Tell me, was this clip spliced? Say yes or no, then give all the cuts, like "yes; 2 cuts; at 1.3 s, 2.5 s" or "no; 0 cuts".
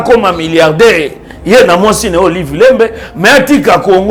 no; 0 cuts